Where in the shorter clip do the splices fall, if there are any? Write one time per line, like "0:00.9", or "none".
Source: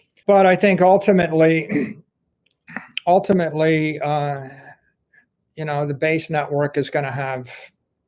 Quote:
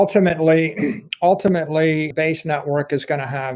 0:01.1
0:02.1